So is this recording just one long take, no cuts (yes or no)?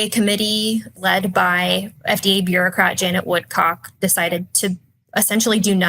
no